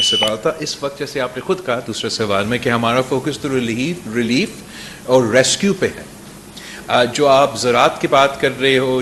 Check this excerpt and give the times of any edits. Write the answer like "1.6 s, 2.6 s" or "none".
none